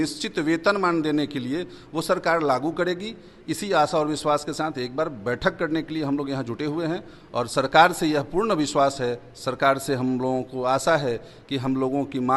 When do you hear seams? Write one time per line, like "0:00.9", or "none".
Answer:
none